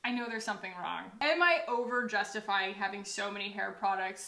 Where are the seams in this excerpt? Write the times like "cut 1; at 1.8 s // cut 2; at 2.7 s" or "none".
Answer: cut 1; at 1.1 s